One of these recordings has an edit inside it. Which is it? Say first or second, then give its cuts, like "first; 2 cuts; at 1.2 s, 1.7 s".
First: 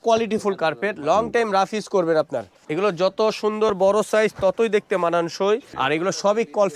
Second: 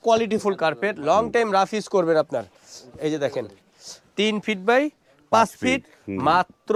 first; 2 cuts; at 2.6 s, 5.7 s